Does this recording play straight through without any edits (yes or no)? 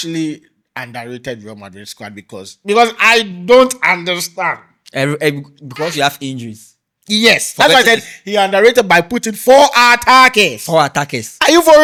yes